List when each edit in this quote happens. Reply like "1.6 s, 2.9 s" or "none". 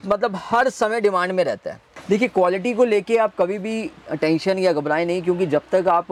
1.9 s